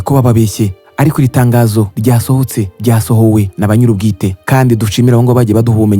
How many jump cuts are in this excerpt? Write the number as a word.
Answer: zero